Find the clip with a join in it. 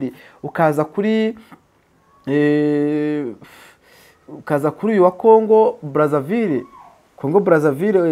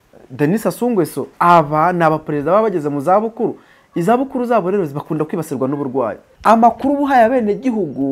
second; 1 cut; at 6.3 s

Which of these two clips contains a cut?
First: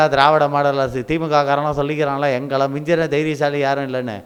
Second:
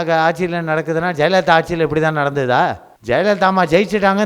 second; 1 cut; at 2.9 s

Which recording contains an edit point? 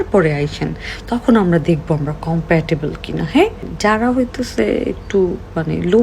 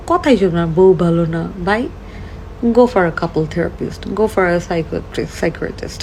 first; 1 cut; at 3.7 s

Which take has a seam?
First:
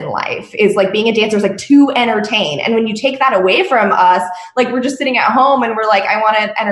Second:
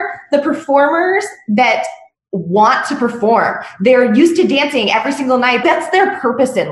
second; 1 cut; at 5.6 s

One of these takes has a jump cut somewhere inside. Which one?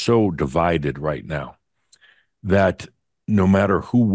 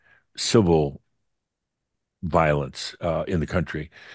second; 1 cut; at 2.8 s

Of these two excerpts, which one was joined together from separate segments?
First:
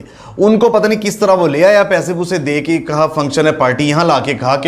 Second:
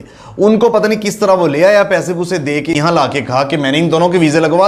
second; 1 cut; at 2.7 s

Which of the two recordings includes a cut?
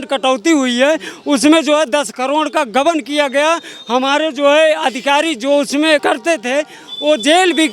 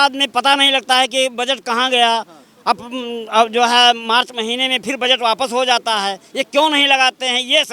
first; 1 cut; at 6.0 s

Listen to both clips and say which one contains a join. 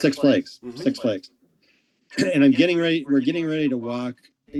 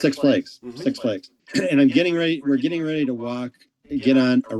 second; 1 cut; at 1.3 s

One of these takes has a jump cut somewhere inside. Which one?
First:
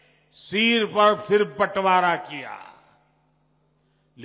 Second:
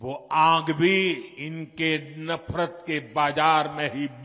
second; 1 cut; at 1.4 s

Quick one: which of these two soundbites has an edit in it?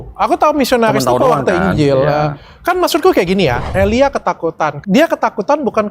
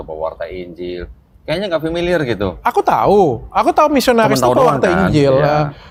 first; 2 cuts; at 3.6 s, 4.8 s

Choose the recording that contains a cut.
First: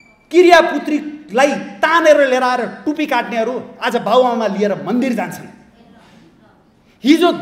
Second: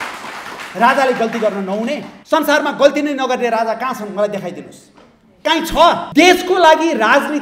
second; 2 cuts; at 2.1 s, 6.1 s

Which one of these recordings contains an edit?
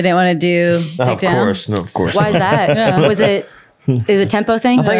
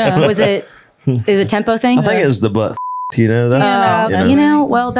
second; 1 cut; at 4.1 s

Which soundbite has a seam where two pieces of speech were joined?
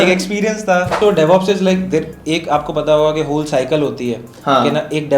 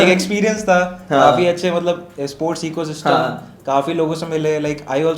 first; 1 cut; at 0.9 s

